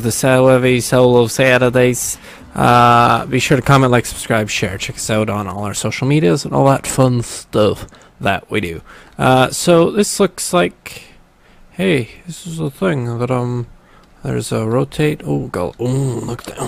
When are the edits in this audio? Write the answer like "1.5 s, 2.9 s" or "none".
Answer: 15.5 s